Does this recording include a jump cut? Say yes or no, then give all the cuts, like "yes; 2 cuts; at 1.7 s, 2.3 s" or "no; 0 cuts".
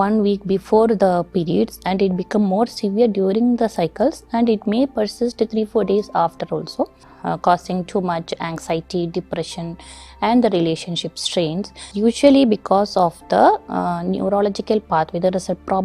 yes; 2 cuts; at 7.1 s, 11.8 s